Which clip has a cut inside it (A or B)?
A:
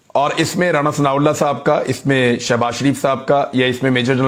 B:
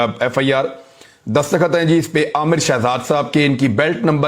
B